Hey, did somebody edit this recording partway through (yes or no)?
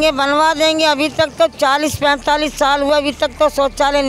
no